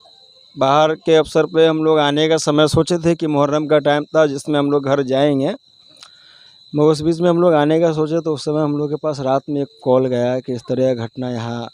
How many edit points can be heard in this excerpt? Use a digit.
0